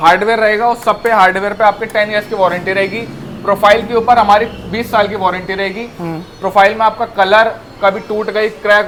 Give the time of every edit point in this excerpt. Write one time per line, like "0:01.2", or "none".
none